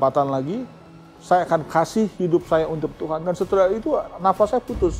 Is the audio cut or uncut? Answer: uncut